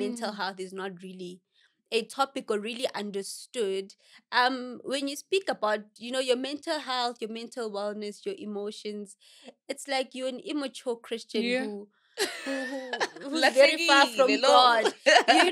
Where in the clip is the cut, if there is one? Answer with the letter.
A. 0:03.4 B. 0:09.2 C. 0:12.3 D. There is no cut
D